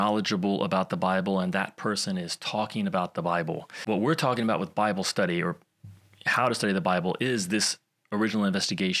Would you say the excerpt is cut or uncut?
cut